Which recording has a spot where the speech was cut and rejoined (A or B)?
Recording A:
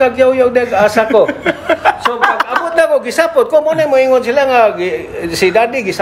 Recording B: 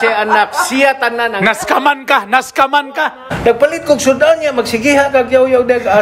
B